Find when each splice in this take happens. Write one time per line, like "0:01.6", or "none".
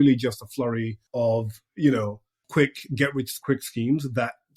0:01.0
0:02.4
0:03.3